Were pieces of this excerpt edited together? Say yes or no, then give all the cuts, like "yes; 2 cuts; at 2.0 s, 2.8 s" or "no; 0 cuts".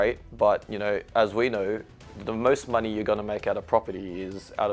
no; 0 cuts